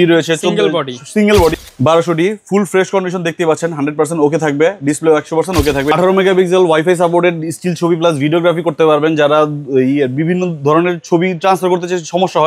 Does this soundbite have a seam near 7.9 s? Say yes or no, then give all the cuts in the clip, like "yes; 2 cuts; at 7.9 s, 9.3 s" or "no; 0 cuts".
no; 2 cuts; at 1.5 s, 5.9 s